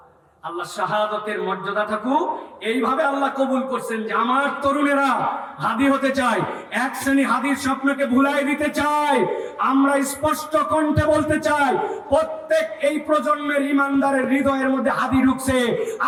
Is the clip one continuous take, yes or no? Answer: yes